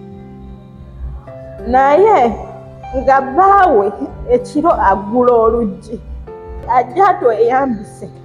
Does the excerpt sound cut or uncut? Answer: cut